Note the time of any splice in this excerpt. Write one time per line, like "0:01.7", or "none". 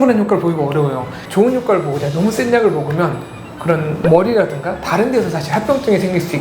0:01.2

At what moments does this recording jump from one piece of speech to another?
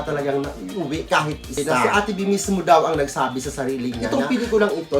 0:01.7
0:04.0

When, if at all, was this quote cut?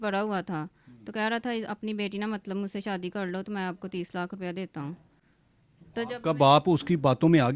none

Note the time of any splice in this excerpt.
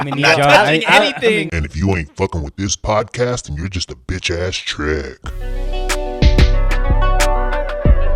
0:01.5

